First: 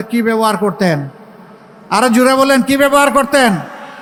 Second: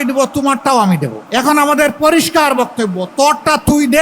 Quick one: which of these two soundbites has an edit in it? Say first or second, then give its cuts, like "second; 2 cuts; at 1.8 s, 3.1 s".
second; 1 cut; at 1.2 s